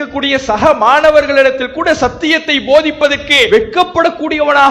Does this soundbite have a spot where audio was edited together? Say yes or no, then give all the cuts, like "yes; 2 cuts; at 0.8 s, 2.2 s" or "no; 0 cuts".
yes; 1 cut; at 3.5 s